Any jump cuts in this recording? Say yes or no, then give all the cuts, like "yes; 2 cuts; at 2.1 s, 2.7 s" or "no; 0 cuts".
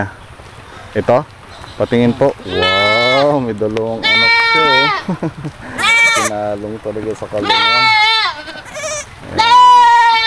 no; 0 cuts